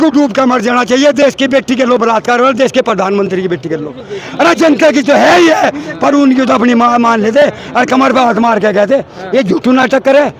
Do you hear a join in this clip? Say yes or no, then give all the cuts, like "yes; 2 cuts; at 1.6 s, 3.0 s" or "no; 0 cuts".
no; 0 cuts